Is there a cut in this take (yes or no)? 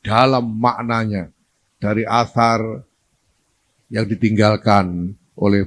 no